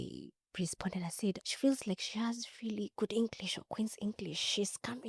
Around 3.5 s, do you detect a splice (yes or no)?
no